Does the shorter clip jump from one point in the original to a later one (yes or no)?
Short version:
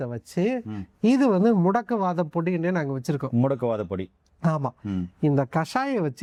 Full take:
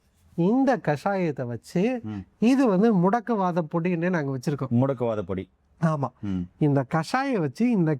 no